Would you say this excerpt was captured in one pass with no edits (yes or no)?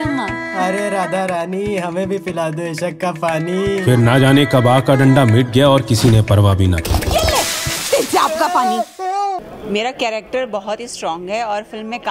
no